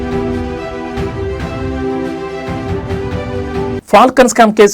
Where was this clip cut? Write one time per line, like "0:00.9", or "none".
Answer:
0:03.4